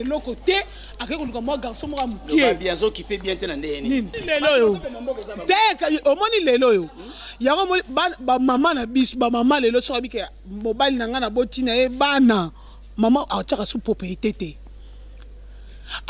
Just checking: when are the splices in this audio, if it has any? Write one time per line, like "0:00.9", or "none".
0:04.1

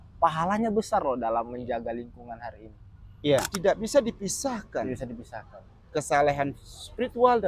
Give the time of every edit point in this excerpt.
0:03.5

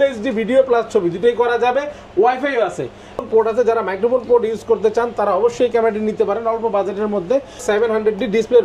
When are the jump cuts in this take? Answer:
0:03.2
0:07.6

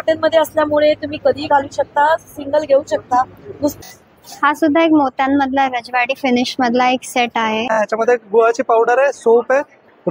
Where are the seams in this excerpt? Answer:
0:03.8
0:07.8

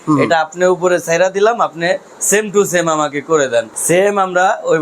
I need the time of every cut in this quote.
0:03.8

